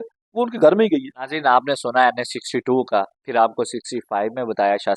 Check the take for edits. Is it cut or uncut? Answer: uncut